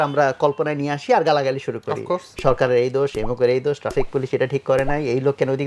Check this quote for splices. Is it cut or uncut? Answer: uncut